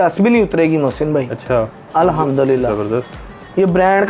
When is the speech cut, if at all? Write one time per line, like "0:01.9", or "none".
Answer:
none